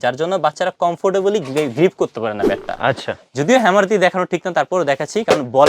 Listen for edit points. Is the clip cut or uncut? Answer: cut